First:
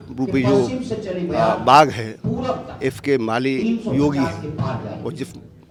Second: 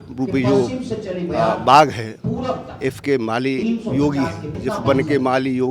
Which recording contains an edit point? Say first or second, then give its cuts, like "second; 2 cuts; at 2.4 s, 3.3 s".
second; 1 cut; at 4.6 s